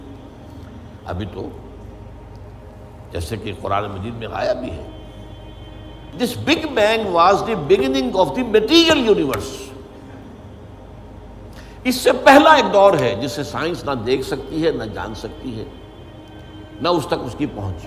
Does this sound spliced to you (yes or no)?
yes